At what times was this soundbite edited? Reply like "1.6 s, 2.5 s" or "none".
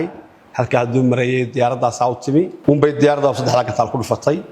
2.5 s